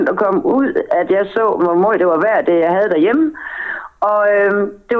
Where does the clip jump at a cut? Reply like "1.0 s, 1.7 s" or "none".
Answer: 1.6 s

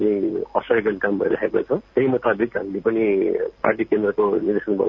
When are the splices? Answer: 1.9 s

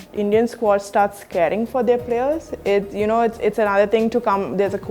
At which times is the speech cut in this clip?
none

